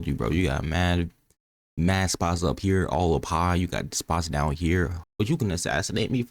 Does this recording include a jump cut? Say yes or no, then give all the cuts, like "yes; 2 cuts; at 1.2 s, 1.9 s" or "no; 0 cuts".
yes; 1 cut; at 5.0 s